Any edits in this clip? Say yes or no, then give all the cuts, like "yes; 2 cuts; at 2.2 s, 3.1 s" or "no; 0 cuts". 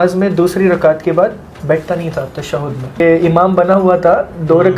yes; 1 cut; at 3.0 s